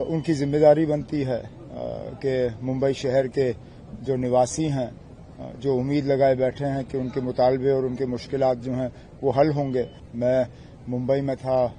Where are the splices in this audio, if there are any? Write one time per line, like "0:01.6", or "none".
0:10.0